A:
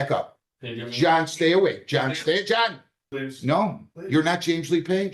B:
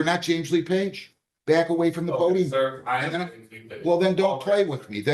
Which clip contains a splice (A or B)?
A